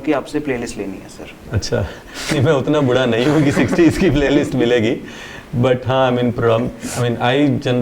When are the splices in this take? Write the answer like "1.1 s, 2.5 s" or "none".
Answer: none